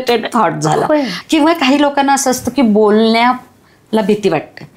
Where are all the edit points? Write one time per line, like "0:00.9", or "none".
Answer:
0:01.2